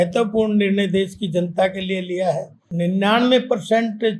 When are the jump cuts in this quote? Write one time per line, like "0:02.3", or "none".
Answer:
0:02.6